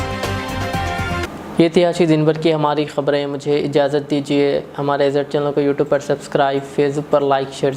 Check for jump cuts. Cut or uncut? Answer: uncut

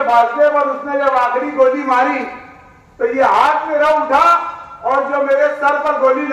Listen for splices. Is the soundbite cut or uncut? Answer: uncut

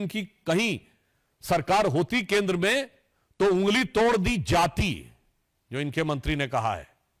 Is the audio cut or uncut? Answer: uncut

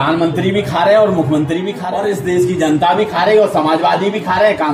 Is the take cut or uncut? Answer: cut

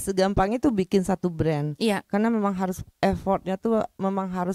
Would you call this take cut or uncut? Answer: uncut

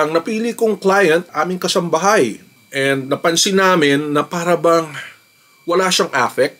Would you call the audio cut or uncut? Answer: uncut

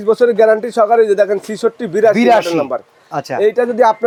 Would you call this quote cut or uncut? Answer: uncut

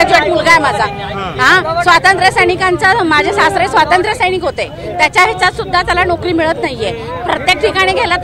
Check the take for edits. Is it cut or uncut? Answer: uncut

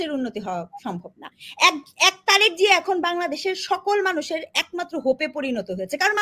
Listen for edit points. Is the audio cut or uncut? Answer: uncut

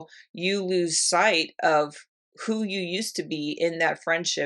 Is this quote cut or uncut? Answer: uncut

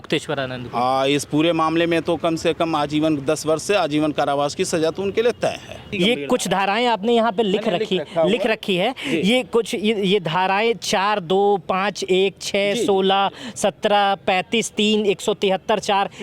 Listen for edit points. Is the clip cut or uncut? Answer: cut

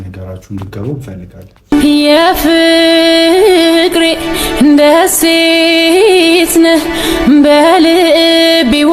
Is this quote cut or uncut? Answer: cut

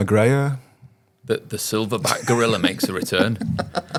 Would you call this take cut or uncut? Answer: uncut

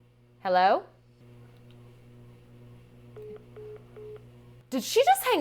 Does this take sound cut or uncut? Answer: cut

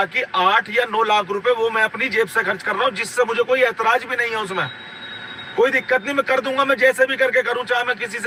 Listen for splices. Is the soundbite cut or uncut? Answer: uncut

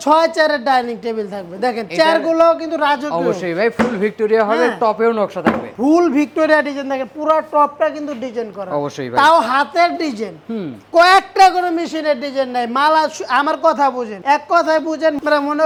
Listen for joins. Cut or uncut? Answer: uncut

